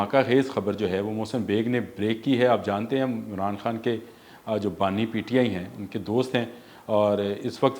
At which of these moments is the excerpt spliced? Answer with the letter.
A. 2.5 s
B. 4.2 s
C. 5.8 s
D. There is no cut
D